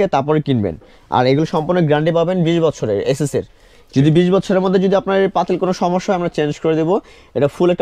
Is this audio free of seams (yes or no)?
yes